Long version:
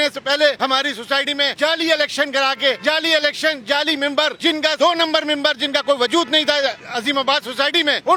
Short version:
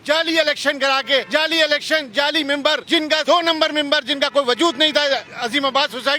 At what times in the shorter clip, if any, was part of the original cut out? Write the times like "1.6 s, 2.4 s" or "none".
none